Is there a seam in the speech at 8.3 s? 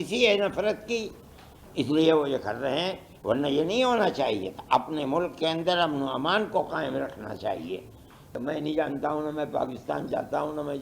yes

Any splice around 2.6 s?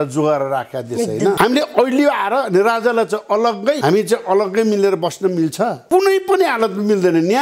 no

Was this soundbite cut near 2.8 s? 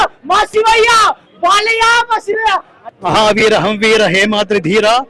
yes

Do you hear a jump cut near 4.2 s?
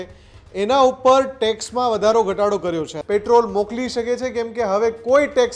no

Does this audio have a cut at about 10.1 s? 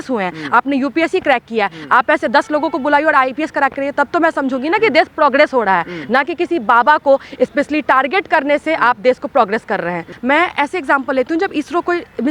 yes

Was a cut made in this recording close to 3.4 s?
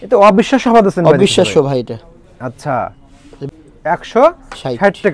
yes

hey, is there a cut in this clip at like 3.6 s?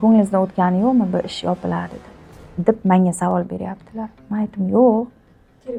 no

